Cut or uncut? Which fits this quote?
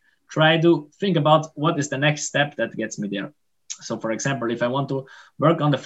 uncut